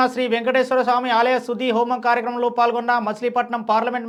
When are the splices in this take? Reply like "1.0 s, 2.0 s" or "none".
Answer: none